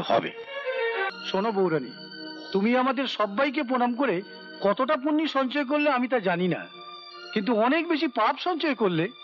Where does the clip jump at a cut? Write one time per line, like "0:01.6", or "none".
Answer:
0:01.1